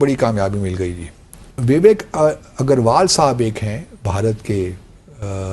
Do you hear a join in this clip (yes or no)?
yes